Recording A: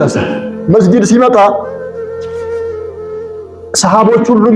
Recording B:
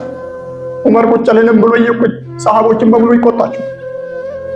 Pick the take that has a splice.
A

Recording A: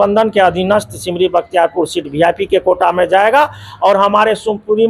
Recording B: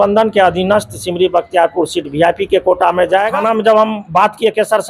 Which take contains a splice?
B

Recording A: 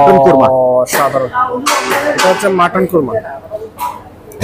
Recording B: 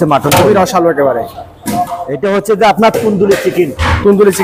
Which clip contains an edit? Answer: B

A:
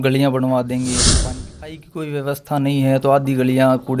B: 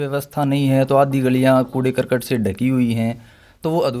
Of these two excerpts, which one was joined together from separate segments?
A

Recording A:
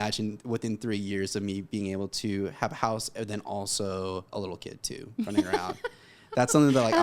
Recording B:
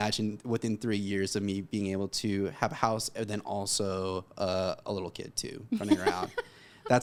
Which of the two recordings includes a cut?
A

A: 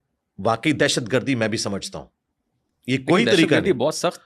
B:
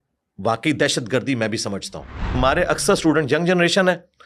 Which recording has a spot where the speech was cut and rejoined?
B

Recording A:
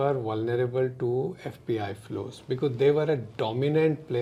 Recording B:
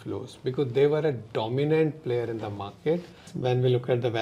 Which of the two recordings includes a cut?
B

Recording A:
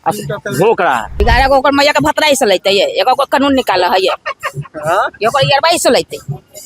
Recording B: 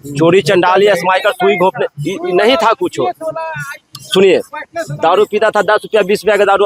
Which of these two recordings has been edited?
A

